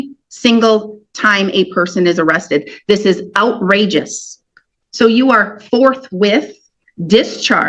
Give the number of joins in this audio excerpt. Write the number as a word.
one